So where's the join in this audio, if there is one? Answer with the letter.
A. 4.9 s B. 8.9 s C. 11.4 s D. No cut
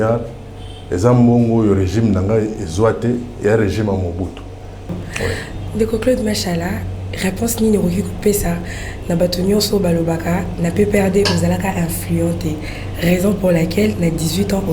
A